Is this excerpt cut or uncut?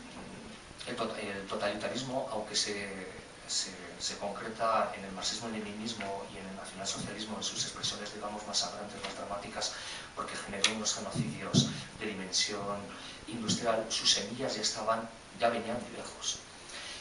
uncut